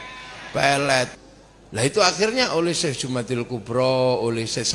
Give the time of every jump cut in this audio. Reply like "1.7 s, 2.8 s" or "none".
1.1 s